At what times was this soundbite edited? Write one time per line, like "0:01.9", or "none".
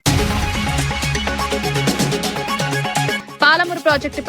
0:01.4
0:02.8